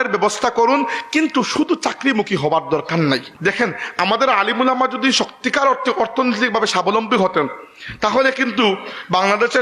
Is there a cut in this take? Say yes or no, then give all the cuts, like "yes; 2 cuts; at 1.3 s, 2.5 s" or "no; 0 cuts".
yes; 1 cut; at 3.3 s